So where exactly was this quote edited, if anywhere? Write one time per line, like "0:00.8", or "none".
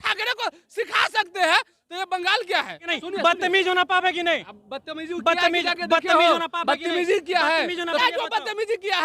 0:02.9
0:08.0